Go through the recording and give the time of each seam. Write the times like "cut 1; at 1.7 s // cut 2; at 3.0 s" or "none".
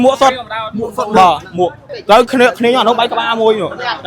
cut 1; at 1.9 s

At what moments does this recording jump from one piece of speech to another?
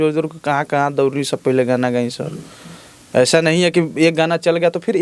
none

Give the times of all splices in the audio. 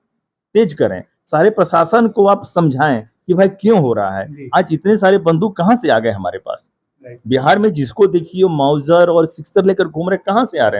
none

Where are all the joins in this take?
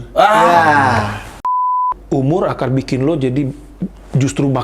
cut 1; at 1.5 s

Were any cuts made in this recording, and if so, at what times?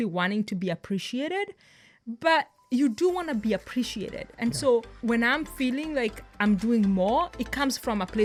none

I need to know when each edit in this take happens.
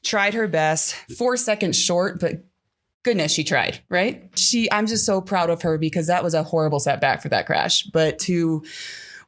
cut 1; at 4.4 s

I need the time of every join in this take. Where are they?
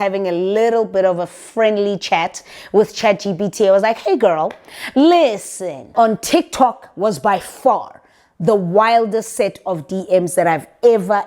cut 1; at 5.9 s

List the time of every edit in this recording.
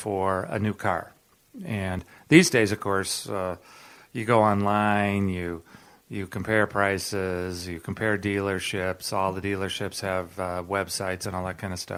none

